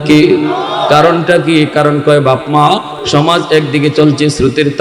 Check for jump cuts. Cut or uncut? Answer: cut